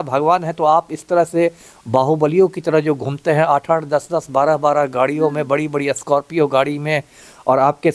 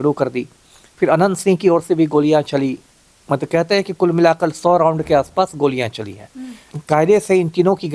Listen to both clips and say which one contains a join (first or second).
second